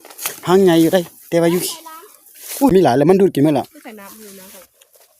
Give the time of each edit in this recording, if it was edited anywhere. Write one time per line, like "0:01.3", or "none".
0:02.7